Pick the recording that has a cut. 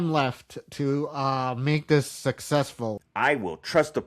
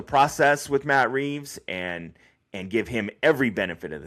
first; 1 cut; at 3.0 s

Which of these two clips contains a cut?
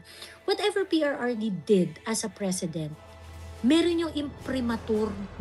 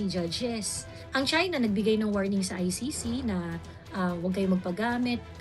second; 1 cut; at 1.0 s

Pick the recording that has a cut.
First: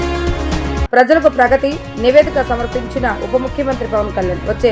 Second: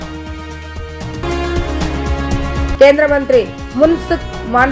second; 1 cut; at 1.2 s

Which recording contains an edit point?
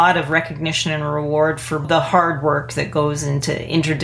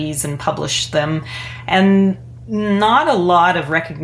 first; 1 cut; at 1.8 s

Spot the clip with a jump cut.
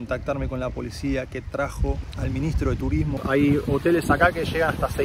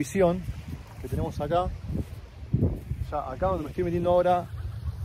first; 1 cut; at 3.2 s

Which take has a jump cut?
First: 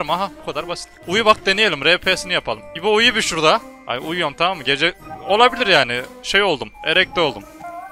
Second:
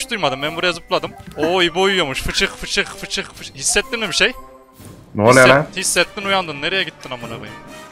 first; 1 cut; at 3.7 s

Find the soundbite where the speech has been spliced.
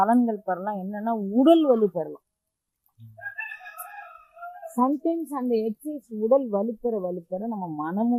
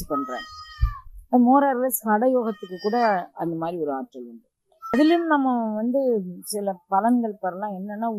second; 1 cut; at 4.9 s

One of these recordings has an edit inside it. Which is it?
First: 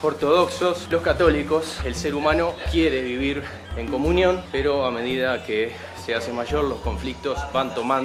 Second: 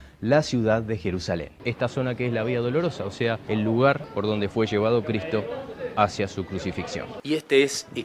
second; 4 cuts; at 1.4 s, 3.4 s, 4.1 s, 7.0 s

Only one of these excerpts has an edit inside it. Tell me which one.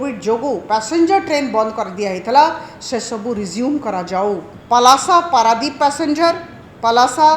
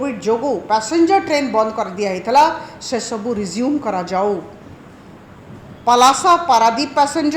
first; 1 cut; at 4.5 s

